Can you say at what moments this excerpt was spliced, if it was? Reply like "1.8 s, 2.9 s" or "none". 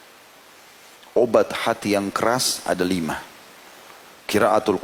none